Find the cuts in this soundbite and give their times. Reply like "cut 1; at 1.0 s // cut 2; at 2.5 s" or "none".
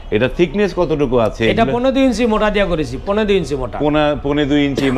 none